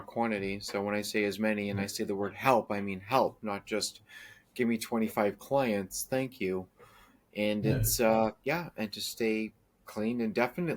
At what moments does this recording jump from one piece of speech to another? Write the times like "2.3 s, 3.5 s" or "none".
none